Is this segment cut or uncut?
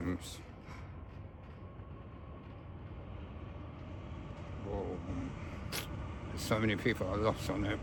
uncut